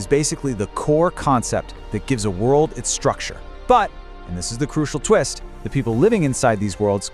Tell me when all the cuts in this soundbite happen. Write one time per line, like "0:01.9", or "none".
none